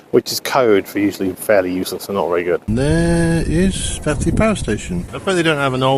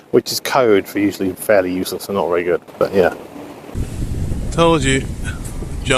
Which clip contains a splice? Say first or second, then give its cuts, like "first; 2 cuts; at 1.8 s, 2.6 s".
first; 2 cuts; at 2.7 s, 5.1 s